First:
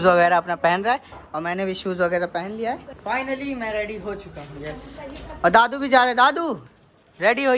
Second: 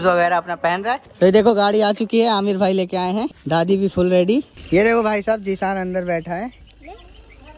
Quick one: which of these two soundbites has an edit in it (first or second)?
second